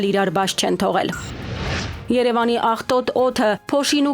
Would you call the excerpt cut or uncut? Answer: cut